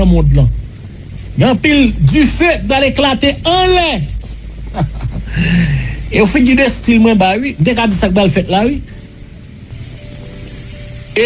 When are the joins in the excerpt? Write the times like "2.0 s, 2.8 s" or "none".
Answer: 9.8 s

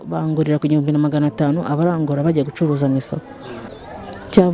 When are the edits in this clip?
none

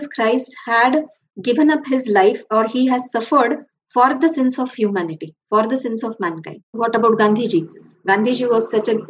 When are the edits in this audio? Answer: 6.7 s

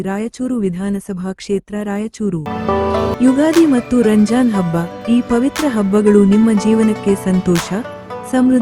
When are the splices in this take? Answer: 2.5 s

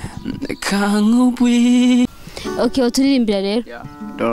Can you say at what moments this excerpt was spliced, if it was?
2.0 s

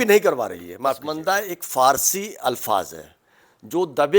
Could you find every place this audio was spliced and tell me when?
1.1 s

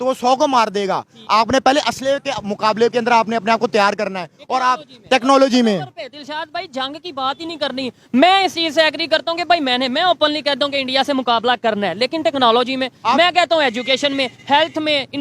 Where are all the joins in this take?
none

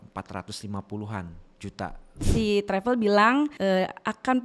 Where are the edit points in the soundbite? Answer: 2.3 s, 3.5 s

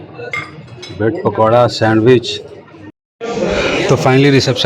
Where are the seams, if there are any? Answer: 3.0 s

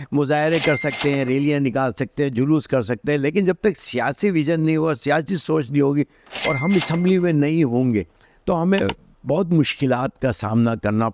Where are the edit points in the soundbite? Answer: none

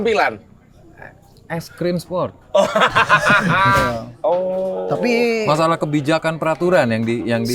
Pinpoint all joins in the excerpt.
3.8 s

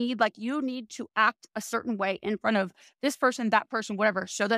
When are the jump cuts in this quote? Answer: none

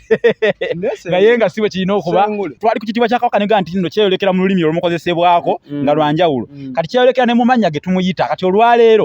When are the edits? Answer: 2.5 s

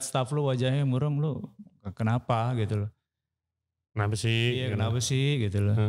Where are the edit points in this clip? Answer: none

